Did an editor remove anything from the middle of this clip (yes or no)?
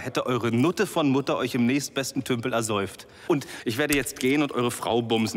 yes